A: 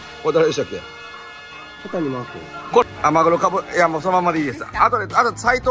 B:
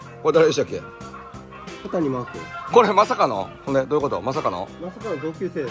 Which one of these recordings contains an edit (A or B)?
A